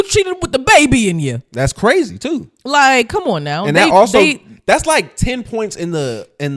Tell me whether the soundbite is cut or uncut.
uncut